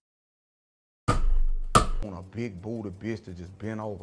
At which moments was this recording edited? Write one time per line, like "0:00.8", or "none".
0:02.1